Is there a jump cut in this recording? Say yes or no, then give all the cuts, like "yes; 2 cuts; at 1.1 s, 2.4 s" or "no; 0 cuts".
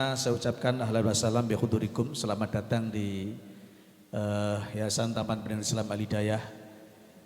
no; 0 cuts